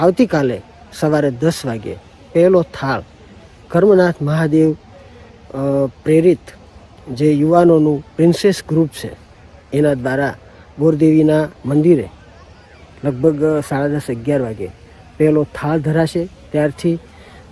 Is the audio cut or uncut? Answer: cut